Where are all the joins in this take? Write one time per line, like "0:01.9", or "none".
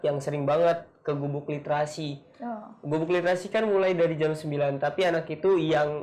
none